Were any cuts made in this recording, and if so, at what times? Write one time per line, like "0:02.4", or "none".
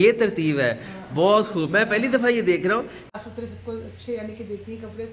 0:03.0